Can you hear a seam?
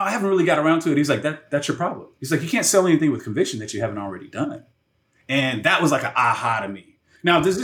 no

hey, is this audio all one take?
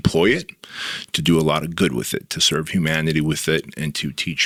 yes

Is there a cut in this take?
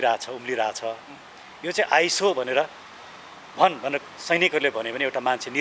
no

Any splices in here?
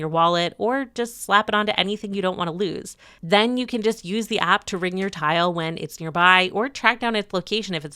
no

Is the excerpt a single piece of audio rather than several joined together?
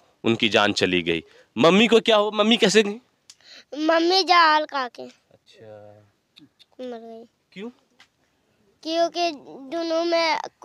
yes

